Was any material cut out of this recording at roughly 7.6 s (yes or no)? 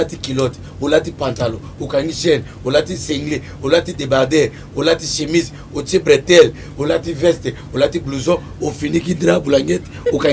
no